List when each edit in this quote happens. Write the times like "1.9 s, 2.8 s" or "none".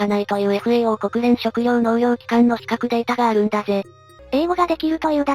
4.1 s

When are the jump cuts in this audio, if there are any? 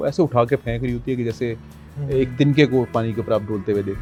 none

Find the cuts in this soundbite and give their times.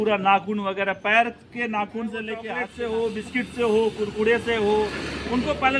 2.6 s

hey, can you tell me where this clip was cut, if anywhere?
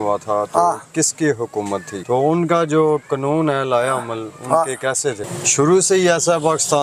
2.0 s, 5.2 s

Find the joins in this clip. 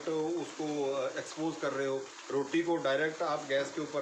none

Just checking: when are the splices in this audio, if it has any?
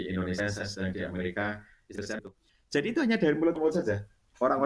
2.2 s

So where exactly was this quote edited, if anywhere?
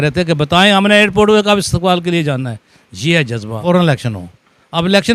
3.6 s

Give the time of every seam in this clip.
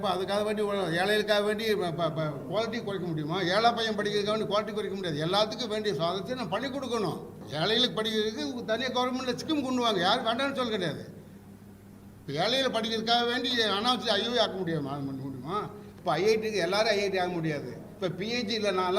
7.4 s, 15.9 s

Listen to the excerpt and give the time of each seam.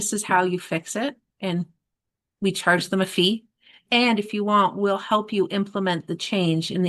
3.8 s

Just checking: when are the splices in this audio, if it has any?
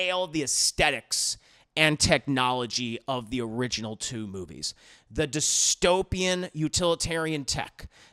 none

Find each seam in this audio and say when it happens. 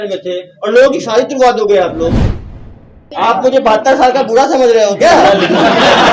2.5 s

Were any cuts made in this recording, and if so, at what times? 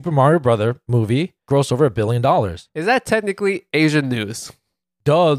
1.5 s

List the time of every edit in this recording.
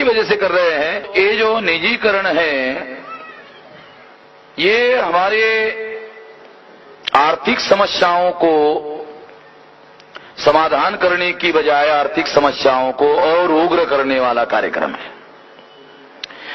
1.1 s, 4.3 s

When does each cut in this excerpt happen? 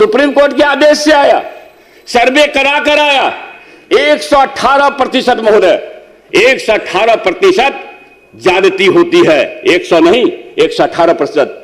none

